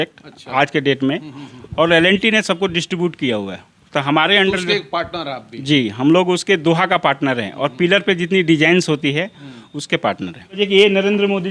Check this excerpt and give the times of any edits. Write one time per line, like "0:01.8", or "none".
0:10.6